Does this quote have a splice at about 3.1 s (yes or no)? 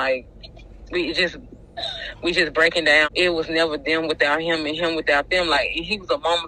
yes